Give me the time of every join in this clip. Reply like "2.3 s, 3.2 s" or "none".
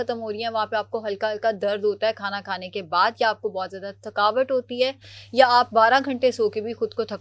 none